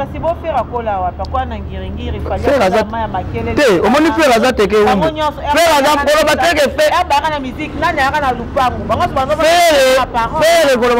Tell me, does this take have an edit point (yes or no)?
no